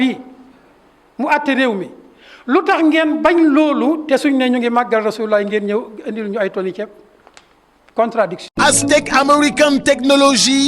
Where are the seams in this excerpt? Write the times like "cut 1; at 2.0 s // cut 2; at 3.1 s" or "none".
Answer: cut 1; at 8.5 s